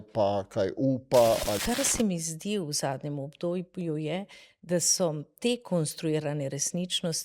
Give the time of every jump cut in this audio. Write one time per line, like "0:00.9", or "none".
0:01.6